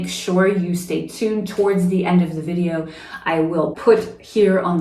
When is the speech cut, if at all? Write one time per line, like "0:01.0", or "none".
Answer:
0:03.8